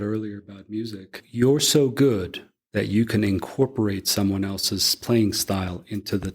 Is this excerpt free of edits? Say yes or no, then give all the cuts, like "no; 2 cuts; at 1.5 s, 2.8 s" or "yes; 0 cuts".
no; 1 cut; at 1.2 s